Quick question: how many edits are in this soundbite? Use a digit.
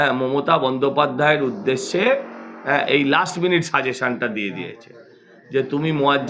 0